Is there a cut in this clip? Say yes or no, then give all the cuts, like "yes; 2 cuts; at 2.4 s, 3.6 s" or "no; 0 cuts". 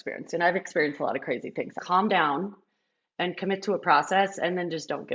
yes; 1 cut; at 1.7 s